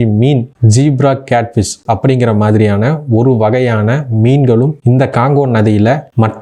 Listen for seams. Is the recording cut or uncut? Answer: uncut